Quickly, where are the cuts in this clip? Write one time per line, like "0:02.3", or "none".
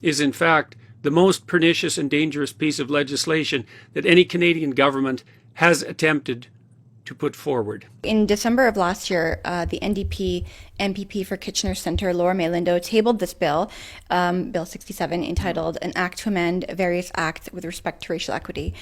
0:07.9